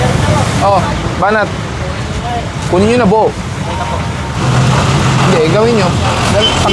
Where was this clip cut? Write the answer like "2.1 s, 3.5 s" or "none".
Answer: none